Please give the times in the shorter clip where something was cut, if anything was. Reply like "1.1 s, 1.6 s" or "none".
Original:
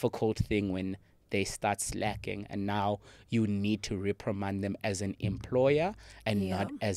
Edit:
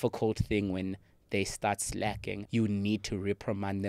2.4 s